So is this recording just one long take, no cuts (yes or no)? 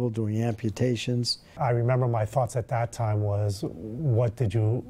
no